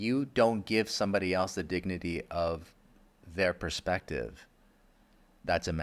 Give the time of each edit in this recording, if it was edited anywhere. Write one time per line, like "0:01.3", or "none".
none